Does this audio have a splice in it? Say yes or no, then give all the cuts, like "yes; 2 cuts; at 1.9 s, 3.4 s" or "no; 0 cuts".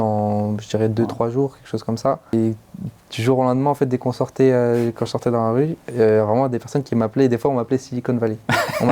yes; 1 cut; at 2.3 s